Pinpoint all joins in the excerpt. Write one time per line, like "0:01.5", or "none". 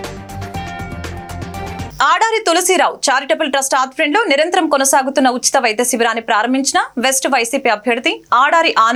none